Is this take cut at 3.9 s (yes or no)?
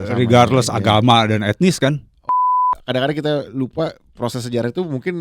no